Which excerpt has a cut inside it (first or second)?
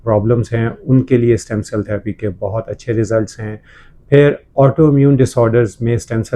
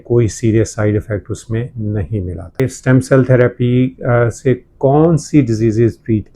second